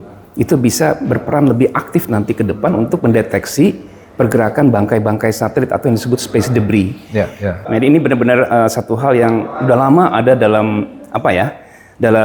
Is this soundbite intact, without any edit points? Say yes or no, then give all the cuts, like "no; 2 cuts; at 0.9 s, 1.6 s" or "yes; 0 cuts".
no; 1 cut; at 7.6 s